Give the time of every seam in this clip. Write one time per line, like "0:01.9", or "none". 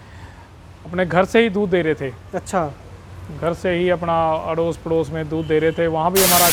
none